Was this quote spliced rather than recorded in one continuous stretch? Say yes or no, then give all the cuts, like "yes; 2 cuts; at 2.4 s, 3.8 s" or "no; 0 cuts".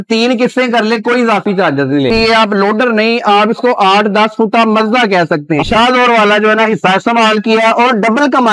yes; 2 cuts; at 2.1 s, 5.6 s